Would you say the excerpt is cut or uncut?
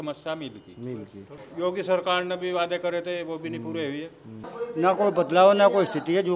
cut